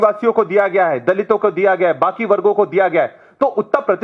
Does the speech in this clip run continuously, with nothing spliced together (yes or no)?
yes